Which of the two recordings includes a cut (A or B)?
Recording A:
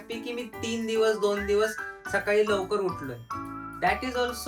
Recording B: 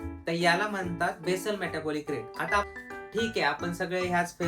B